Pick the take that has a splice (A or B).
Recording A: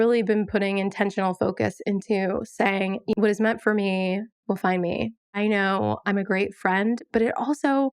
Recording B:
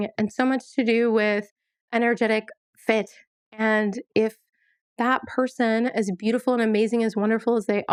A